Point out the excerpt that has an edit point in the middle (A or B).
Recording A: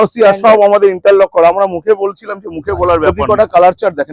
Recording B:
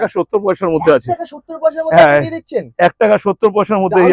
A